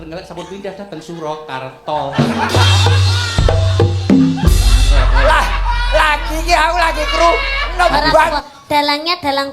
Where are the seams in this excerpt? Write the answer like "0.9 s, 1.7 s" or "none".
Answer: 8.4 s